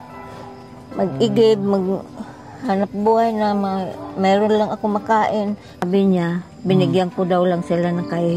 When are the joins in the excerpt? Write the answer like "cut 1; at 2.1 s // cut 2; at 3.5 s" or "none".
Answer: cut 1; at 5.8 s